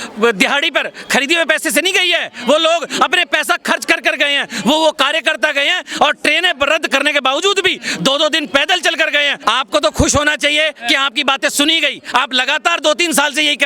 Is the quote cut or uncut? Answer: cut